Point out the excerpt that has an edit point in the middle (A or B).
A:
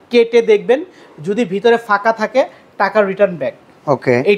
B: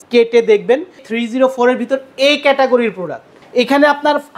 B